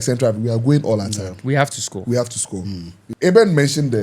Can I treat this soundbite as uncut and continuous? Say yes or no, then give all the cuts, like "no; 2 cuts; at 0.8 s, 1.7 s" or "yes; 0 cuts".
no; 1 cut; at 3.0 s